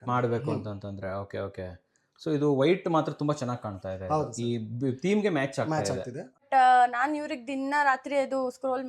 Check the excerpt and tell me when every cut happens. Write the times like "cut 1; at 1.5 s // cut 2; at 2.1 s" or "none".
cut 1; at 6.4 s

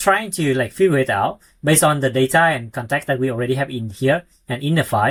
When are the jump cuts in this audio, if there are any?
none

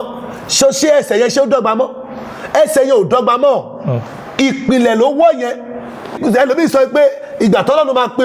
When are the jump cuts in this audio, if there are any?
cut 1; at 6.1 s

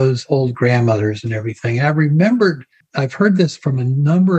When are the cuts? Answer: none

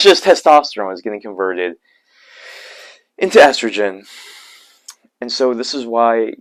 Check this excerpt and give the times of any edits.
none

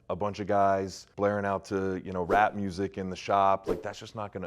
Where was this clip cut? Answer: cut 1; at 1.0 s

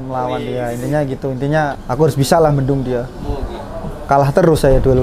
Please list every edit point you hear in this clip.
cut 1; at 1.8 s

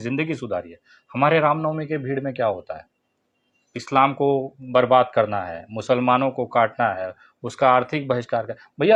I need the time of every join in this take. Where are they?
none

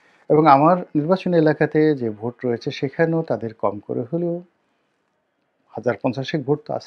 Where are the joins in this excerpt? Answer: none

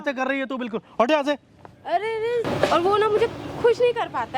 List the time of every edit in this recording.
cut 1; at 2.5 s

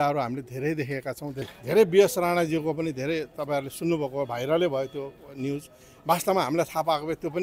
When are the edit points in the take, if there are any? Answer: cut 1; at 1.6 s

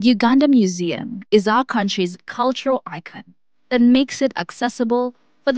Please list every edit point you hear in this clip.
none

